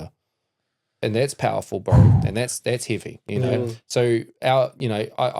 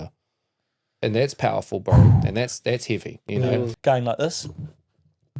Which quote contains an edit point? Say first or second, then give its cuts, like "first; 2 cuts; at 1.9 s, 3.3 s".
second; 1 cut; at 3.7 s